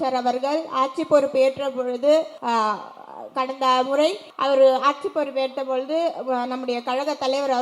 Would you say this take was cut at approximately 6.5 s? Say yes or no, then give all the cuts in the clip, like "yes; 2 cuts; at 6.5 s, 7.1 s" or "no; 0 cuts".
no; 2 cuts; at 2.3 s, 4.3 s